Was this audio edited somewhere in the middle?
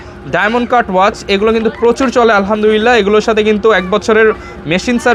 no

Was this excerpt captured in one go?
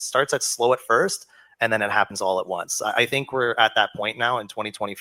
yes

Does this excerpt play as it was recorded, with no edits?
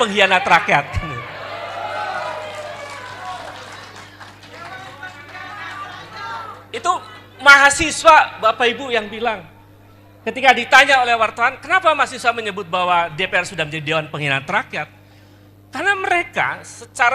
yes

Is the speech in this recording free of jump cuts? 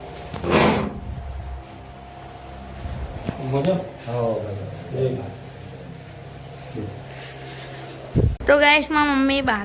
no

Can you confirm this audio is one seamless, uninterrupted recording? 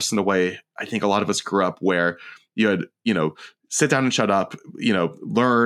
yes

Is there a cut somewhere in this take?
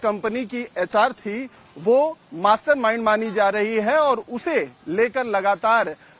no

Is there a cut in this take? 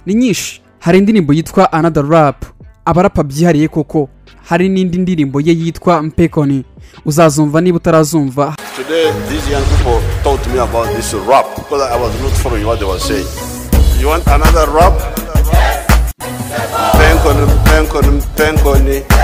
yes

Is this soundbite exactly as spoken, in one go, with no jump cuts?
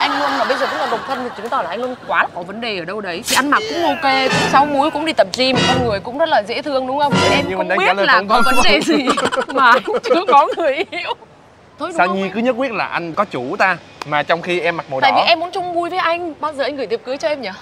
no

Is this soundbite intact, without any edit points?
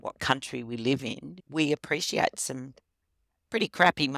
no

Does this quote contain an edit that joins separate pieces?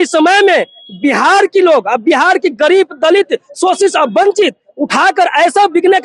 no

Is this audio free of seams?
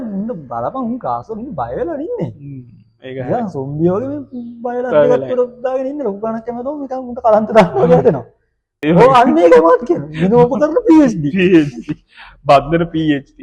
no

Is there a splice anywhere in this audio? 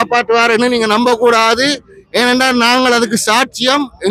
no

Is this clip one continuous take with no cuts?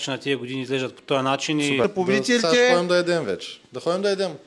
no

